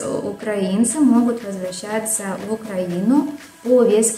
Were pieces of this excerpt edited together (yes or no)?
no